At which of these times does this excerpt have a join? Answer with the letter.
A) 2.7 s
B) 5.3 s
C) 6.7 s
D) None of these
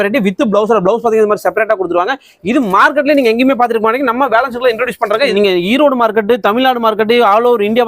B